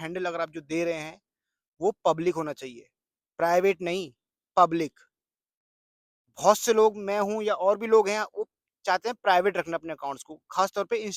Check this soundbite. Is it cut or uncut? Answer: uncut